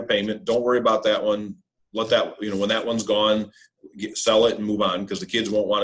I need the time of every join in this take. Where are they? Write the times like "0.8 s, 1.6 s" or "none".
none